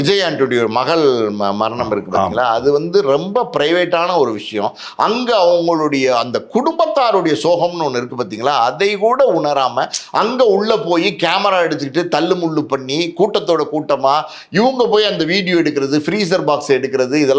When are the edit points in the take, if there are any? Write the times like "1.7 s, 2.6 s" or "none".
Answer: none